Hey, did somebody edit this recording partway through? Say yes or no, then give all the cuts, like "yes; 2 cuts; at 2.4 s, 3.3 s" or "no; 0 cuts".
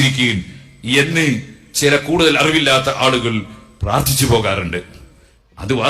yes; 1 cut; at 4.5 s